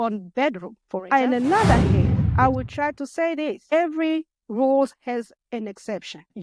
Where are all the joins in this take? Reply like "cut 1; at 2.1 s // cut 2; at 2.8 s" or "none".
cut 1; at 1.0 s